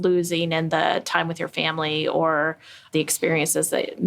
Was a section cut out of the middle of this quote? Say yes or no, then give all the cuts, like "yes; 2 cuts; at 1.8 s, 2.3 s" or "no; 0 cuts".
yes; 1 cut; at 2.9 s